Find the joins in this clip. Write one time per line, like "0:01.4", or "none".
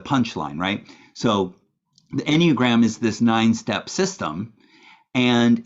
none